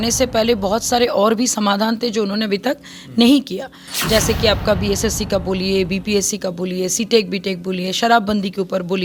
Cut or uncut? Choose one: uncut